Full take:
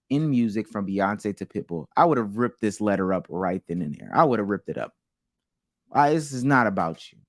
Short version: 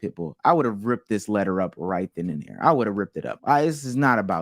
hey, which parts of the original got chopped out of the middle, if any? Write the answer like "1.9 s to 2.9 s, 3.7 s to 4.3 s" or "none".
4.8 s to 5.7 s